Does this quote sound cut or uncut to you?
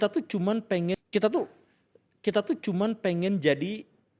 uncut